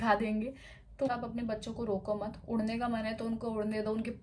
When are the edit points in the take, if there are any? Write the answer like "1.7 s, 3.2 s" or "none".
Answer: 1.1 s